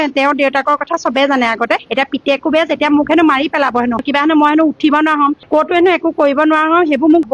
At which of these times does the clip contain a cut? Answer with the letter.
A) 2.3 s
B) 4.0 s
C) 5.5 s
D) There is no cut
B